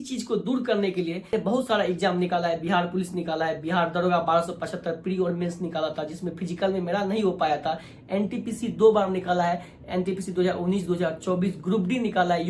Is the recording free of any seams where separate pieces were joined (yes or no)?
no